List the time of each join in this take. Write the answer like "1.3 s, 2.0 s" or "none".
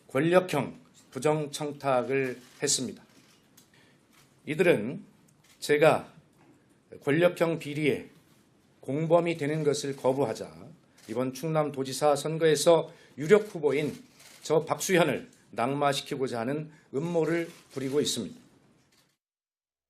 5.2 s